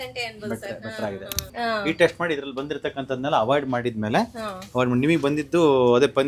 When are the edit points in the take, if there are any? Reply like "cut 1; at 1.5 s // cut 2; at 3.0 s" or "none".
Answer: cut 1; at 1.5 s